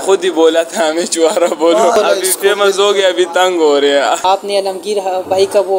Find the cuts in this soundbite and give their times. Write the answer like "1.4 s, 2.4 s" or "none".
2.0 s, 4.2 s